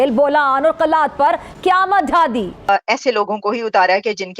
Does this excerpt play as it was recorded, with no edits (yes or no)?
no